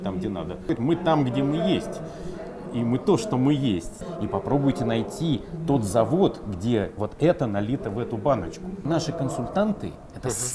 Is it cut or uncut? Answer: cut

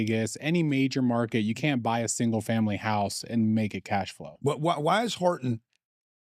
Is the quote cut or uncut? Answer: cut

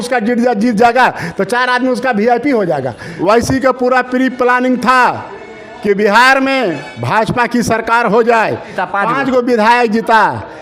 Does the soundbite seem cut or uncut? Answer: cut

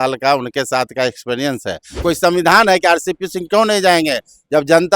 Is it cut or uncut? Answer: cut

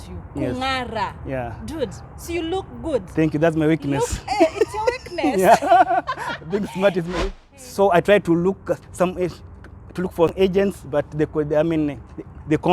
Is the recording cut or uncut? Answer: cut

